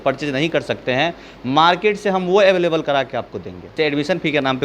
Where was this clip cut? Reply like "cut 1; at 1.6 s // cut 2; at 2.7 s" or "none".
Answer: cut 1; at 3.7 s